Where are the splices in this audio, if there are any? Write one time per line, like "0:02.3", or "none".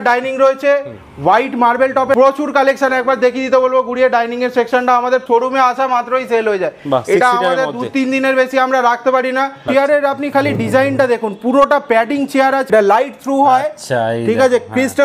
0:02.2
0:05.2
0:09.6
0:12.6